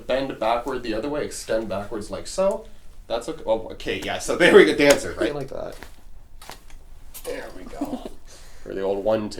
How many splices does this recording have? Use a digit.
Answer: 1